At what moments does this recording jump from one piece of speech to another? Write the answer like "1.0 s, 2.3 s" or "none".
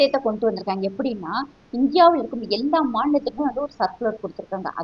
none